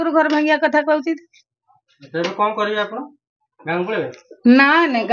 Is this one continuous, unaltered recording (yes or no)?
yes